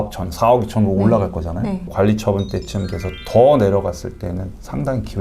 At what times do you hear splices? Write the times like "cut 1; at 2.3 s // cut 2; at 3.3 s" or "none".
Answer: cut 1; at 1.9 s

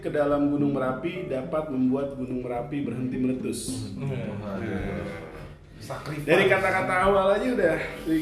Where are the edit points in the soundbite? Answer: none

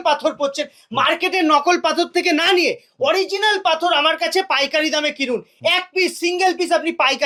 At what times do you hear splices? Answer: none

